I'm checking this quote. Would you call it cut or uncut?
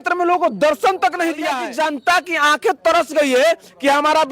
cut